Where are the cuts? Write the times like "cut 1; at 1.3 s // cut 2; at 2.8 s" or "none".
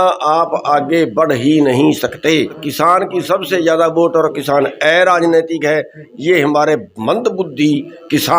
cut 1; at 2.6 s